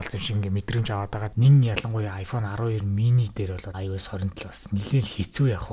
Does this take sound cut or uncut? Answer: cut